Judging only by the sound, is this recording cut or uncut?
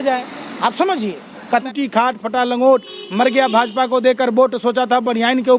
cut